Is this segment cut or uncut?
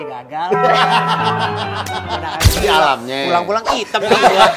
cut